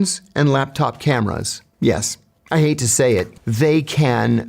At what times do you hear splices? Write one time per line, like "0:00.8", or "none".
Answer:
0:03.4